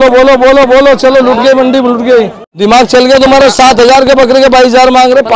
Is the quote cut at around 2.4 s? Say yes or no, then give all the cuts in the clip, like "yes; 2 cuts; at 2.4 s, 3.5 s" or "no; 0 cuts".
yes; 1 cut; at 2.4 s